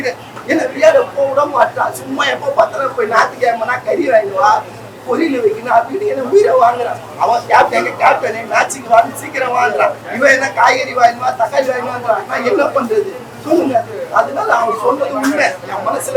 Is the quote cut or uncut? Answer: uncut